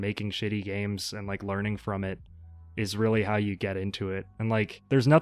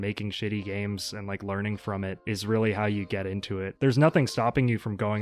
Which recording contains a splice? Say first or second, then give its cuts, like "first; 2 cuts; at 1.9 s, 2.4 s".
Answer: second; 2 cuts; at 2.2 s, 3.7 s